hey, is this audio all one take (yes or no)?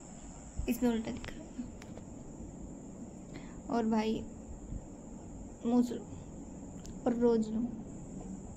yes